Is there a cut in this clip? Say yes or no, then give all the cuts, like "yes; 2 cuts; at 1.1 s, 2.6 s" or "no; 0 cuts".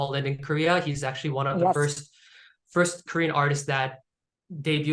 no; 0 cuts